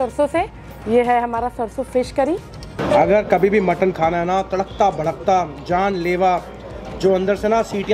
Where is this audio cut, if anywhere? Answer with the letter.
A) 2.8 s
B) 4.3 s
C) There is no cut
A